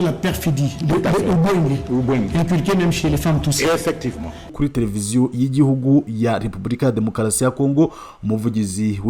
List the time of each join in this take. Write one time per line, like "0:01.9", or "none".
0:04.5